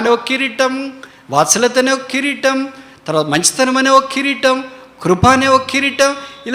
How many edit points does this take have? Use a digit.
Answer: 0